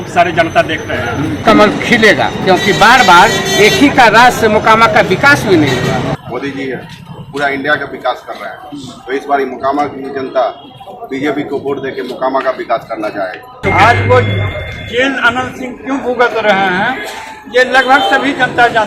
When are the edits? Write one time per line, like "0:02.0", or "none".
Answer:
0:01.4
0:06.2
0:13.6